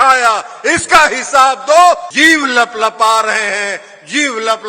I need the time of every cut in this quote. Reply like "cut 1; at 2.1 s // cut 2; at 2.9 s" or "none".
cut 1; at 2.1 s